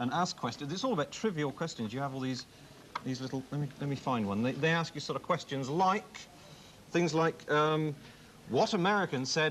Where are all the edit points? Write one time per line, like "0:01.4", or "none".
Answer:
0:06.1